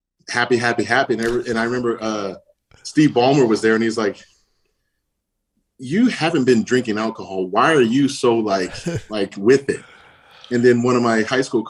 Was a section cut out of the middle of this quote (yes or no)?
no